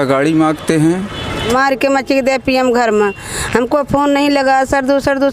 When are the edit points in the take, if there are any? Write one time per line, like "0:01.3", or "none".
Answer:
0:01.5